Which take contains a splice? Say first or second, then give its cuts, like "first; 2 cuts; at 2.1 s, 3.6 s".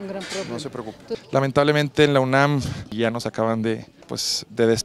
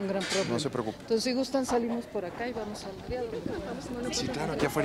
first; 1 cut; at 1.1 s